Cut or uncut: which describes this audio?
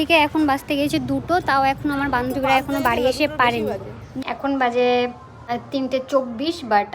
cut